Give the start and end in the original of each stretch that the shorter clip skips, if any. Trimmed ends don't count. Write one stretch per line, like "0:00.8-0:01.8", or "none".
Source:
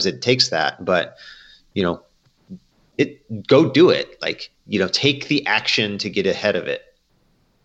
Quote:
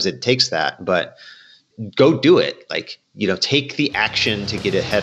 0:01.7-0:03.2